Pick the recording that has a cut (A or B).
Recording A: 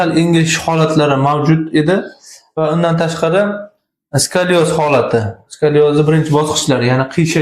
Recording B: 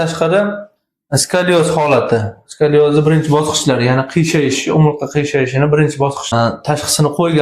B